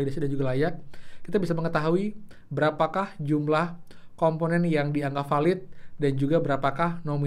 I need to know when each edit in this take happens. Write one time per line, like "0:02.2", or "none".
none